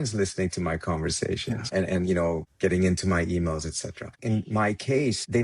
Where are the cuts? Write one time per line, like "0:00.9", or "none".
0:04.1